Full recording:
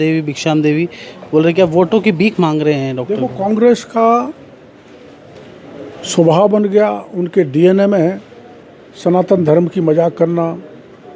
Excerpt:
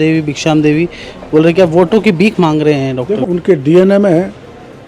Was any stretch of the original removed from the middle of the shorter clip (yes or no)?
yes